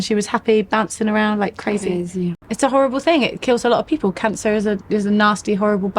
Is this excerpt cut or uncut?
cut